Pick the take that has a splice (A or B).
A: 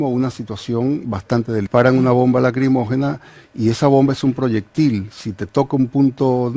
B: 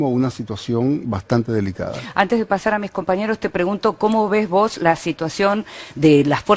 B